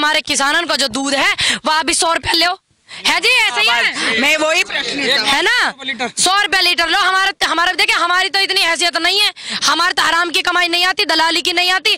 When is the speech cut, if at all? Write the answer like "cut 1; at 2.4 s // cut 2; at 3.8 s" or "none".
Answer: none